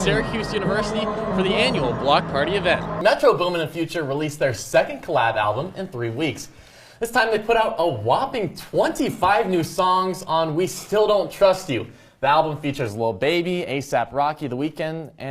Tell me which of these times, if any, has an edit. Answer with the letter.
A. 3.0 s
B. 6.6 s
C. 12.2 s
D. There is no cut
A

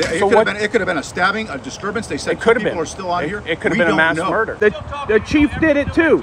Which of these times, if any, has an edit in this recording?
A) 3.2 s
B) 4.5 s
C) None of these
B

